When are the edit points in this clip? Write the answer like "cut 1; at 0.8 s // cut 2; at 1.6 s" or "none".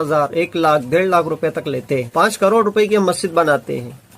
cut 1; at 2.1 s